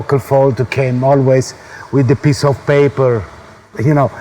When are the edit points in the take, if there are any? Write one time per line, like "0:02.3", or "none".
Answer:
none